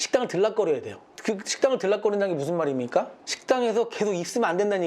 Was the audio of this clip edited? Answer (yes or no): yes